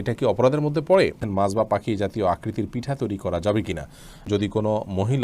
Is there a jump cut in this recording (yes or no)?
yes